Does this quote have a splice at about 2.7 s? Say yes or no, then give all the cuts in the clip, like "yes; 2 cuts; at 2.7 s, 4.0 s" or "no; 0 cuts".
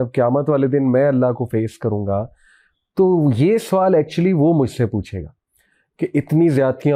no; 0 cuts